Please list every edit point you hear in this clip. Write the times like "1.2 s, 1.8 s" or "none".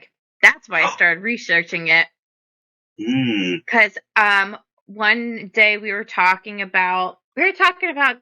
7.2 s